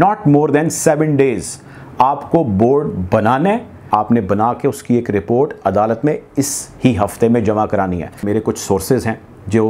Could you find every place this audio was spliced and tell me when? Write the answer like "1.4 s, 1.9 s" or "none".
3.8 s, 8.2 s